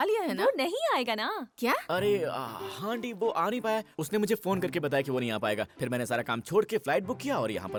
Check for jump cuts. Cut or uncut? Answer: uncut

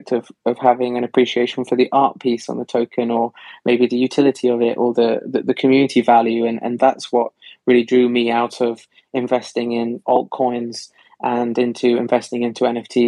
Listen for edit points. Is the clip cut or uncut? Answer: uncut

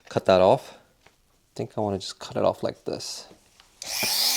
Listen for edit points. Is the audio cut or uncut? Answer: uncut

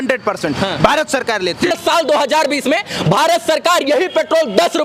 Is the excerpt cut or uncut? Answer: cut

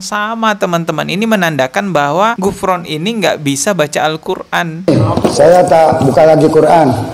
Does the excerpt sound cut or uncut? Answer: cut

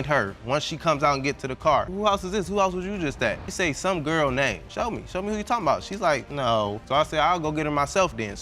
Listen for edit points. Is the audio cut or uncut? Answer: cut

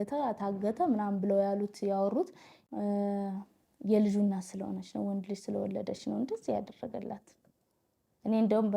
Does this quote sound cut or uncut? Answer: cut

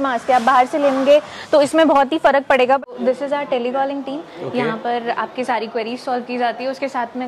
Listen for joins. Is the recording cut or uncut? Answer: cut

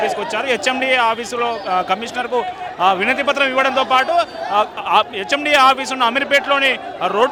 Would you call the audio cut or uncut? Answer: uncut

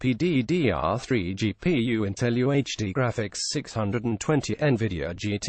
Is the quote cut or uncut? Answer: cut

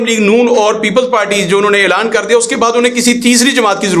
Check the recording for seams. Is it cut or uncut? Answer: uncut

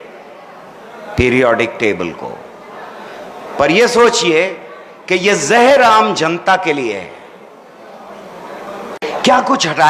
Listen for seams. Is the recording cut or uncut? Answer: cut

